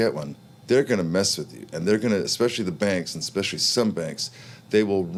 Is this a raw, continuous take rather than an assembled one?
yes; 0 cuts

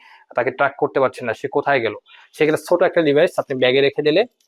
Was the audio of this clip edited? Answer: no; 0 cuts

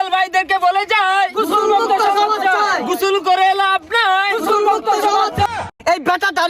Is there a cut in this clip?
yes; 1 cut; at 5.6 s

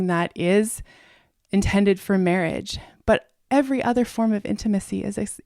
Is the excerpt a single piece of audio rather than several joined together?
no; 1 cut; at 3.3 s

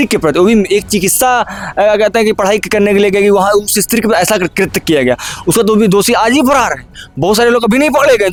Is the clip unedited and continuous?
yes; 0 cuts

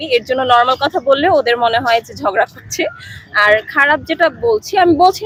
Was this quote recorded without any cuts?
yes; 0 cuts

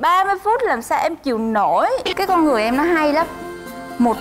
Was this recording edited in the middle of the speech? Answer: yes; 1 cut; at 2.1 s

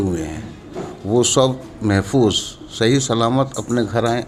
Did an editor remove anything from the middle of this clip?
no; 0 cuts

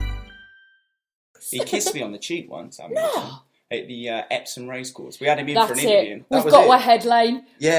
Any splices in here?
yes; 1 cut; at 1.4 s

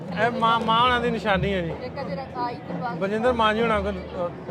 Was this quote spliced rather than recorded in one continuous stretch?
no; 0 cuts

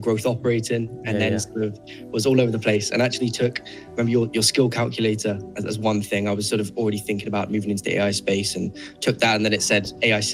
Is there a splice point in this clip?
no; 0 cuts

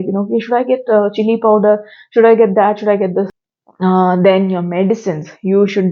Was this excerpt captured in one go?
no; 1 cut; at 3.4 s

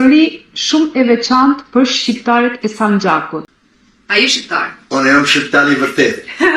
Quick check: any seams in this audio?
yes; 1 cut; at 3.5 s

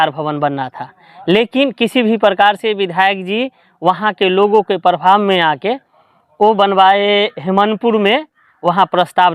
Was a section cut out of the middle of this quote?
no; 0 cuts

